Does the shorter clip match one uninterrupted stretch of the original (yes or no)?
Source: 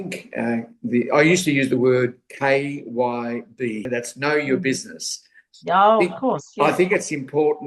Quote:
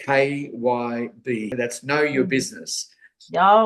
yes